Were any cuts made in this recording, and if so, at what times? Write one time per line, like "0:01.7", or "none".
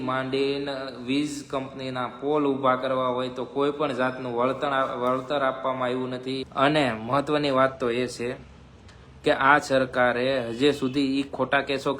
0:06.5